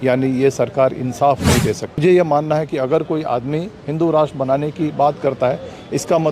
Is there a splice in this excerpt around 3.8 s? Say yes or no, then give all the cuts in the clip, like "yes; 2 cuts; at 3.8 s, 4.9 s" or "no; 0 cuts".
no; 1 cut; at 2.0 s